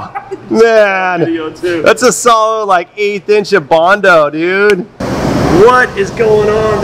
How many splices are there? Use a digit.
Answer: 1